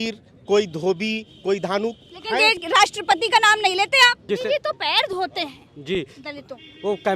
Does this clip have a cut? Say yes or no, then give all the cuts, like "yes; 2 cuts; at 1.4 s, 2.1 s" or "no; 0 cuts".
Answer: yes; 1 cut; at 4.2 s